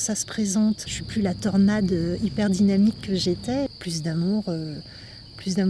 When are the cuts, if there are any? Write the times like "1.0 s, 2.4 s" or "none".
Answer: 0.9 s, 3.8 s